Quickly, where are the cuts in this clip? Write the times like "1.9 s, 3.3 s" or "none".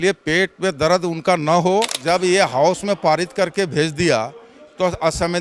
2.0 s